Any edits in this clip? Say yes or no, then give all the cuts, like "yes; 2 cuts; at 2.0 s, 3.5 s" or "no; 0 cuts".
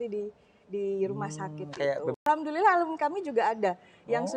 yes; 1 cut; at 2.2 s